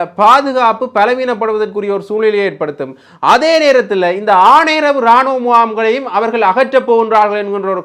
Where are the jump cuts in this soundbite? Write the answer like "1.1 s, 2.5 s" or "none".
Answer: none